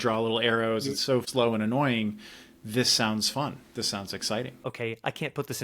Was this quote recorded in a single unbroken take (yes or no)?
no